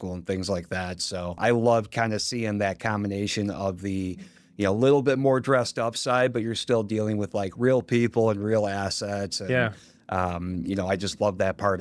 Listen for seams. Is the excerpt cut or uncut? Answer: uncut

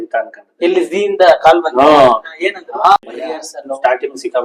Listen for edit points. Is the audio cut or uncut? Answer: cut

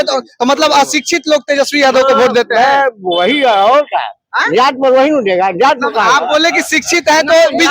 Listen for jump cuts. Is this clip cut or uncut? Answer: uncut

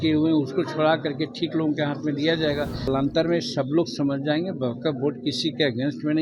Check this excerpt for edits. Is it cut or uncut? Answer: cut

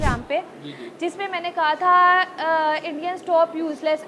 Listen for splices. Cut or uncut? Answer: uncut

